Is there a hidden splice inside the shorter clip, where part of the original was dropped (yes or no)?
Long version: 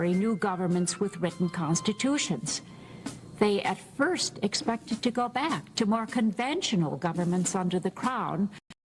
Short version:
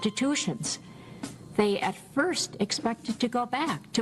no